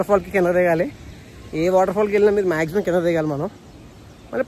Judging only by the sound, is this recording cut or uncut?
uncut